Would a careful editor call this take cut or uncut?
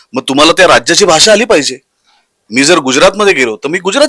uncut